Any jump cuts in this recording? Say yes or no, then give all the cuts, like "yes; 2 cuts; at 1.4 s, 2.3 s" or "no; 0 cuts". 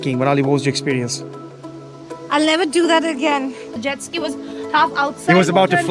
yes; 1 cut; at 3.8 s